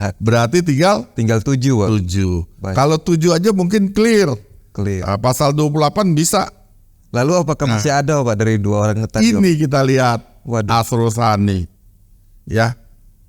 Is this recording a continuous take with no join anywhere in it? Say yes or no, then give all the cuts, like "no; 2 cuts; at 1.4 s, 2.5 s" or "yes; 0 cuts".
yes; 0 cuts